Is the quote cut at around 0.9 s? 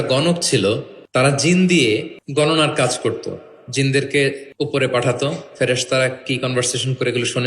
yes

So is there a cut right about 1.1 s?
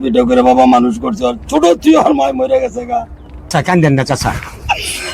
no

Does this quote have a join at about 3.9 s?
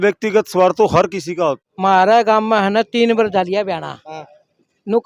no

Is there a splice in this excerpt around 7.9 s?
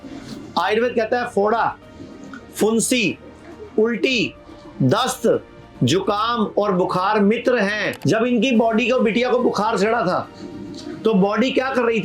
yes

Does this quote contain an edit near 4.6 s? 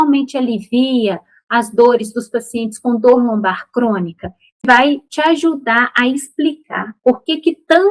yes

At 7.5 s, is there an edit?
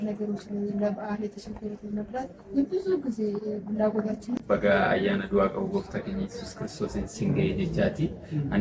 no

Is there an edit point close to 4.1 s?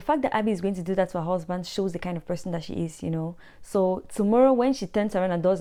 no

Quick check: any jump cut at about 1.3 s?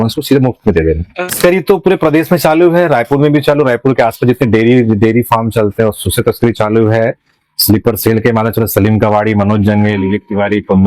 yes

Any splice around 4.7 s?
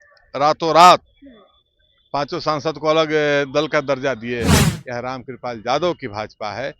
yes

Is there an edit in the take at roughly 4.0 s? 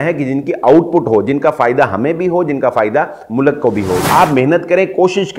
yes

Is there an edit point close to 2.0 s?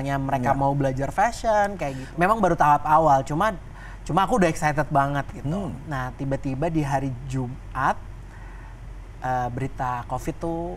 yes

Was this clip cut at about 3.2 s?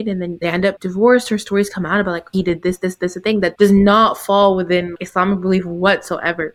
no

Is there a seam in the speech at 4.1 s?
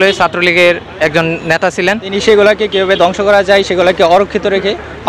no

